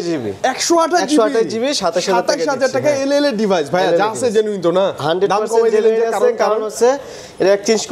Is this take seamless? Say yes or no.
yes